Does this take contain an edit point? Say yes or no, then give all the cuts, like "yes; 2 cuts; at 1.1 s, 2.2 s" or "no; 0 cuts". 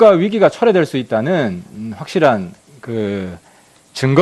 yes; 1 cut; at 1.6 s